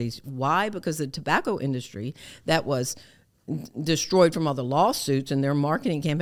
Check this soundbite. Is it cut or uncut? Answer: uncut